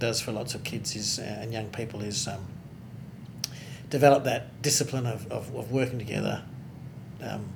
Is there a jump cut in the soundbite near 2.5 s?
no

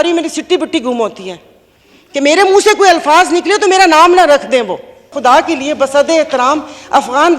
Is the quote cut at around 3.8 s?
no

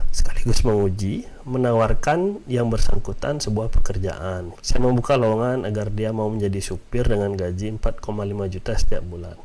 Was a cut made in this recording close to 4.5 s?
yes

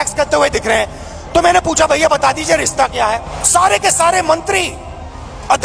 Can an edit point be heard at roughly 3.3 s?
yes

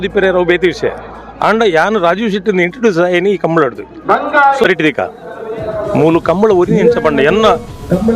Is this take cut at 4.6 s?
yes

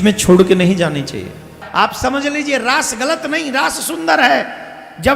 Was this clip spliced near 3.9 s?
no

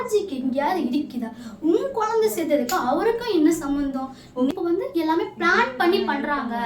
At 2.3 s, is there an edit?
no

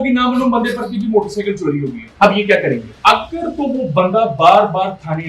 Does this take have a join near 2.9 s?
yes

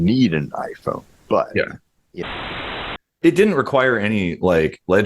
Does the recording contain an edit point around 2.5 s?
yes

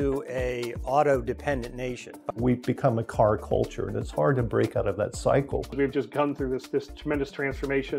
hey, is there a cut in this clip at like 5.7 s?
yes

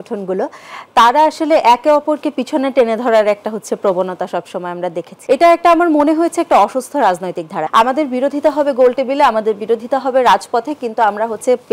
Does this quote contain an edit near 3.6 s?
no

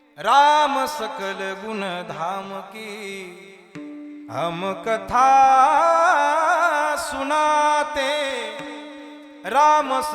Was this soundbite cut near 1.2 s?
no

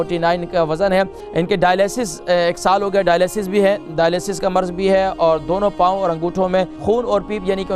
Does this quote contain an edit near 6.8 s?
yes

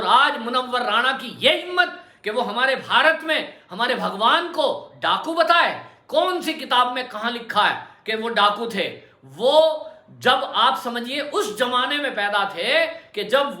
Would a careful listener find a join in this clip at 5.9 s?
no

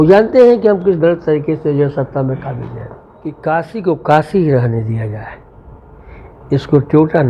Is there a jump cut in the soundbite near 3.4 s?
yes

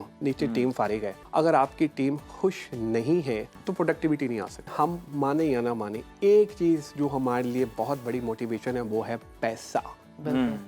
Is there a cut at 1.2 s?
yes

